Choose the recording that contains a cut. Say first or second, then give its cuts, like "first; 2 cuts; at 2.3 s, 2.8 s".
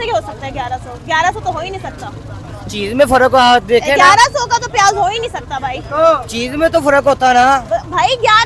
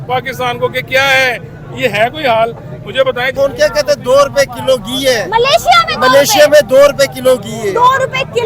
second; 1 cut; at 3.3 s